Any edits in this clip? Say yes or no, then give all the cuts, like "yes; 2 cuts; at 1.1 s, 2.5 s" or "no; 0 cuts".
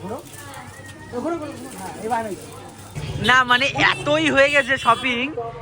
yes; 1 cut; at 3.0 s